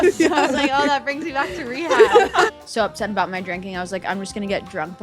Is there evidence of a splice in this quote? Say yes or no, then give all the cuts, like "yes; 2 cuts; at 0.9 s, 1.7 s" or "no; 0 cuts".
yes; 1 cut; at 2.5 s